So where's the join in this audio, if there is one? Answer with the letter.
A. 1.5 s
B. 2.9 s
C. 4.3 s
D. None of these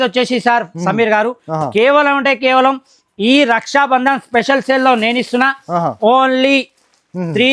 D